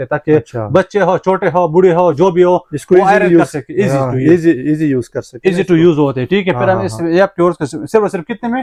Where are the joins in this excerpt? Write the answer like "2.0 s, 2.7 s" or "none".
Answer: none